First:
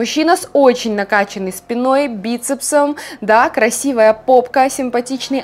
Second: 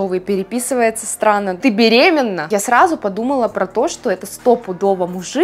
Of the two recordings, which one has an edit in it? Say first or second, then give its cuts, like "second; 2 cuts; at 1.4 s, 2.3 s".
second; 2 cuts; at 1.6 s, 2.4 s